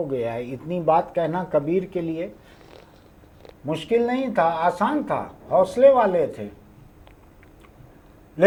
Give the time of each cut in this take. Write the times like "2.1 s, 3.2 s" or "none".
none